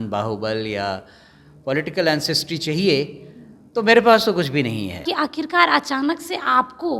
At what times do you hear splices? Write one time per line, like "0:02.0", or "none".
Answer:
0:05.1